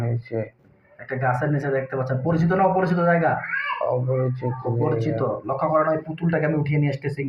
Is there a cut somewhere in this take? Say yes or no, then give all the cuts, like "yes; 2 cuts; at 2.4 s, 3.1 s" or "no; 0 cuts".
no; 0 cuts